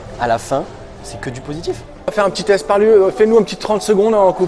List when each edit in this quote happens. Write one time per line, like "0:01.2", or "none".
0:02.1